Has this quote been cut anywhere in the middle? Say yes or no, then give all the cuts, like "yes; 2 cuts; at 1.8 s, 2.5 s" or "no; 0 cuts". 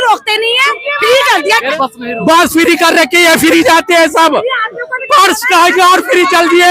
yes; 1 cut; at 1.7 s